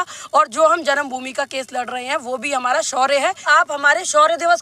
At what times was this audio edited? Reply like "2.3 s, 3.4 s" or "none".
3.5 s